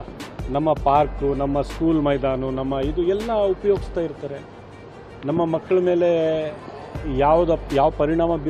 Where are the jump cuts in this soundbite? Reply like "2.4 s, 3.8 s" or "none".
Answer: none